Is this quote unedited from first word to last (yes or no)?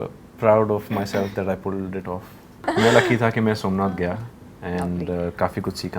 no